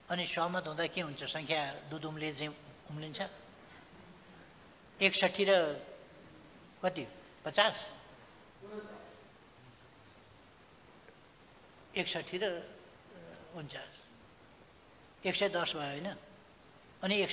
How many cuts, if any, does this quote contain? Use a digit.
0